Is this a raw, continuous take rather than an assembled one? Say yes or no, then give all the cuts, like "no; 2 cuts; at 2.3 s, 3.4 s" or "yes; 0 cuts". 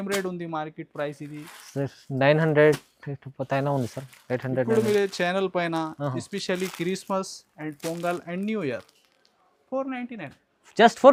yes; 0 cuts